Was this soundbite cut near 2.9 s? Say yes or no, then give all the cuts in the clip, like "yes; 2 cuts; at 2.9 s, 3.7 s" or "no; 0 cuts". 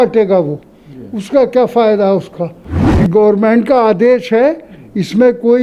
yes; 1 cut; at 2.9 s